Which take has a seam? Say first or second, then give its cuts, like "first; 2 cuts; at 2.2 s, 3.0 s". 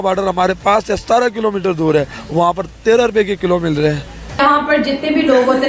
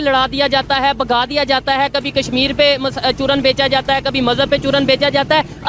first; 1 cut; at 4.4 s